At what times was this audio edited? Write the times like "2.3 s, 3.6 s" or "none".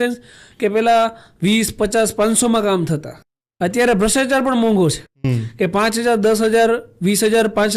none